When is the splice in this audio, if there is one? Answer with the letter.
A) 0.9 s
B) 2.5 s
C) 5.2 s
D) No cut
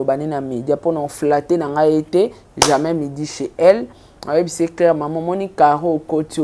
D